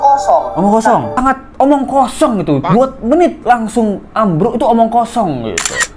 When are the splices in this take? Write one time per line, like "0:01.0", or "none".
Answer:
0:01.2